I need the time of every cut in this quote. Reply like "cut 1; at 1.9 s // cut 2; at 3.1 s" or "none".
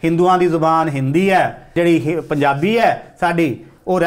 cut 1; at 1.7 s